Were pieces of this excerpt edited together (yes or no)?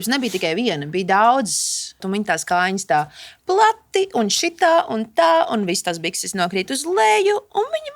yes